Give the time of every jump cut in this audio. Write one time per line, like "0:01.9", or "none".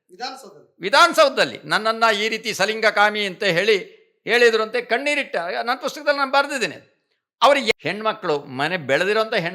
0:07.7